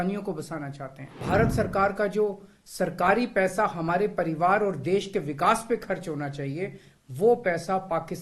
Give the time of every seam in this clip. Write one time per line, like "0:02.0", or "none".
0:01.1